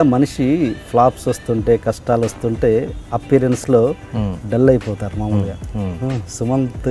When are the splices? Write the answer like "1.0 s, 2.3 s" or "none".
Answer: none